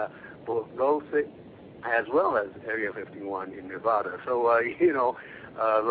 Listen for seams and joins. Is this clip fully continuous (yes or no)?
yes